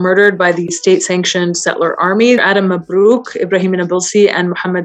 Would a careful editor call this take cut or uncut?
cut